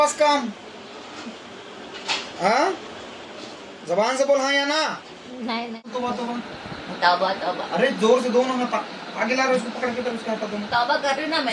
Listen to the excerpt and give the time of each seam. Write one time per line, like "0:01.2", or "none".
0:05.9